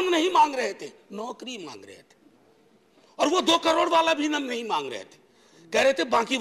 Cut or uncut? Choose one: uncut